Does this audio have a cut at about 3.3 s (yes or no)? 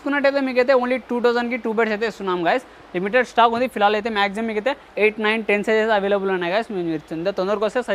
no